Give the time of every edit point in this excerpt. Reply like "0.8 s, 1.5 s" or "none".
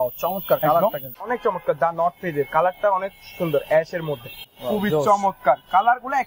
1.1 s, 4.4 s